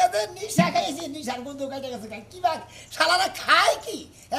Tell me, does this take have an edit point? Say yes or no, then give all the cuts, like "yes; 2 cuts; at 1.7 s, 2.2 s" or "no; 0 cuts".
no; 0 cuts